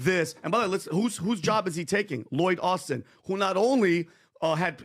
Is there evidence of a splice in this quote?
yes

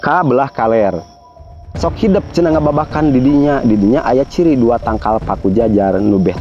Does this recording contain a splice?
no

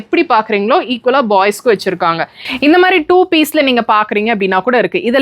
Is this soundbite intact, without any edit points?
no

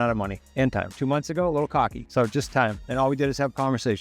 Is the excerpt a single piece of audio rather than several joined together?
no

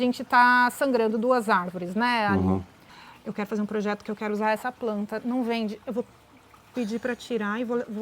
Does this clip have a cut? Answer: yes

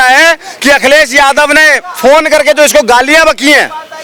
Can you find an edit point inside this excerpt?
no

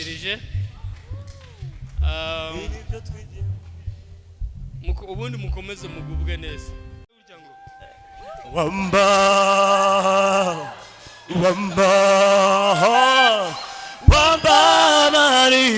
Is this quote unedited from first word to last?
no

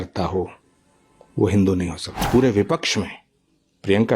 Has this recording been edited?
yes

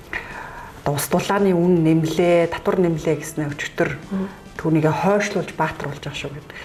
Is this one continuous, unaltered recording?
yes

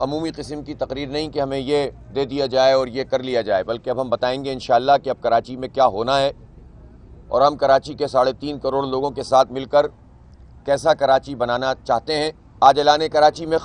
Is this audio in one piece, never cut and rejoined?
no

